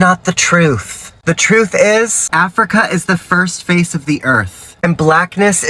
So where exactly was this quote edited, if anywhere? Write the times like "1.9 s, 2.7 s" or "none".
none